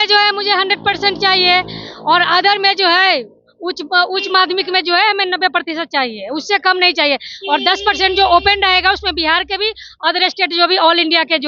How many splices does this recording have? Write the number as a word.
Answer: zero